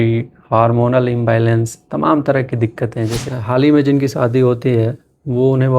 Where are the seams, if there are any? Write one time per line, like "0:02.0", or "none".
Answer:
0:03.2